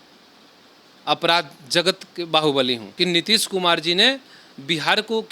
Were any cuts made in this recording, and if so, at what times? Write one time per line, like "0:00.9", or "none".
0:02.9

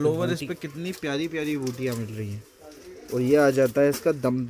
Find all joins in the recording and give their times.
none

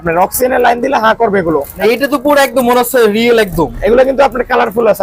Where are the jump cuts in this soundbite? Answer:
0:01.7

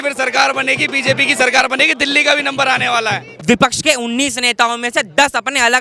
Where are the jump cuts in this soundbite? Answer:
0:03.3

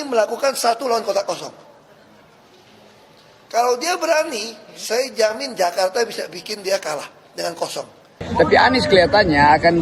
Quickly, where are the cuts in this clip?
0:08.2

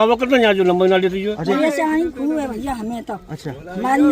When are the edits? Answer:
0:01.5

